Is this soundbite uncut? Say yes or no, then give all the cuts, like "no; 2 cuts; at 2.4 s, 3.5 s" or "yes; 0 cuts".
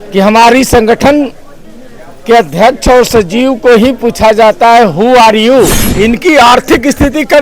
no; 1 cut; at 5.8 s